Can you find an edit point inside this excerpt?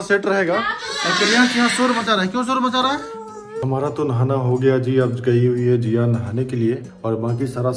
yes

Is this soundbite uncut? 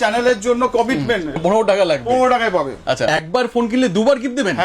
no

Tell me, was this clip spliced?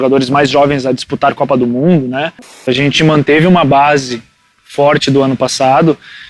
yes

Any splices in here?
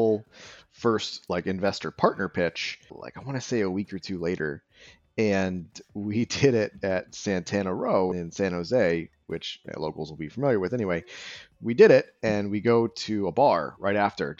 no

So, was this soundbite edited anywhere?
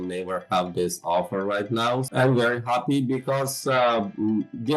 yes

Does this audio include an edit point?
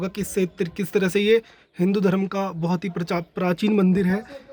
no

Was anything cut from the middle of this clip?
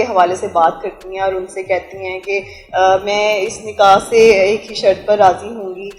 no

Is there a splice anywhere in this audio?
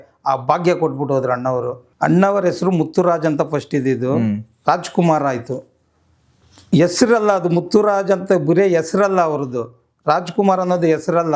yes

